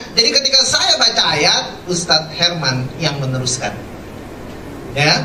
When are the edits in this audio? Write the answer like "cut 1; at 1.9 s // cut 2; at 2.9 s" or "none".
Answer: none